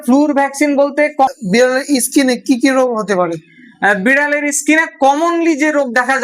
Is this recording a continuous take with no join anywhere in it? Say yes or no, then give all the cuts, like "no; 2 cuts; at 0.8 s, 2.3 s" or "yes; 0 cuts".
no; 1 cut; at 1.3 s